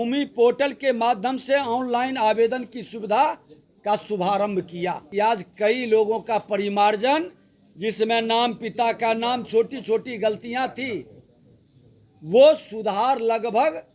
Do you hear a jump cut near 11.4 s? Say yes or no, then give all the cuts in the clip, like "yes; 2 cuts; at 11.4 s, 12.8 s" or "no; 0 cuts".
no; 1 cut; at 5.0 s